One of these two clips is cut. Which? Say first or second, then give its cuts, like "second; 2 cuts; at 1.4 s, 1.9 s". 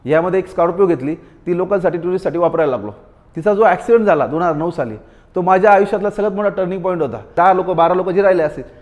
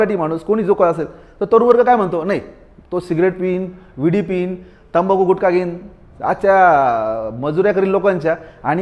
first; 1 cut; at 7.3 s